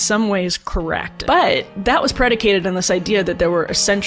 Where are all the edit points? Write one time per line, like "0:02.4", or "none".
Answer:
0:01.1